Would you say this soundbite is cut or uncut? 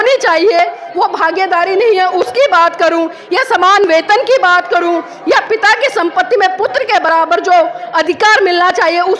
uncut